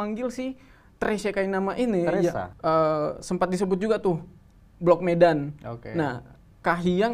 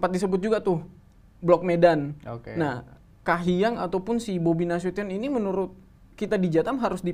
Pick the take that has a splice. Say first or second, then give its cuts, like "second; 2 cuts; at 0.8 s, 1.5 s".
first; 1 cut; at 2.5 s